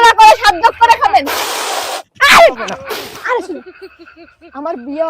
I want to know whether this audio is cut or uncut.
cut